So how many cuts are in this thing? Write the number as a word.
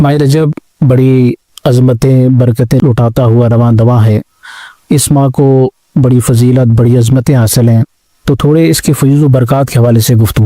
one